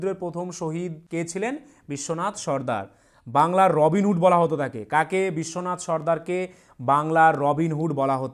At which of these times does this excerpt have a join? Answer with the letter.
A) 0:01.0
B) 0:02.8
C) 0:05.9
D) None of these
A